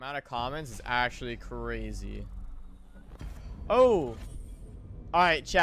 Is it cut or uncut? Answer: uncut